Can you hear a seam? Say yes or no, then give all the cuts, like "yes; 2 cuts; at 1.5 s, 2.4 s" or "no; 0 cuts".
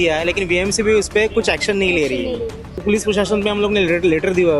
yes; 1 cut; at 2.8 s